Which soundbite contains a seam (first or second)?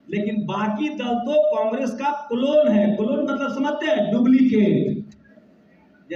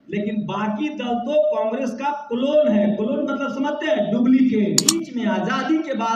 second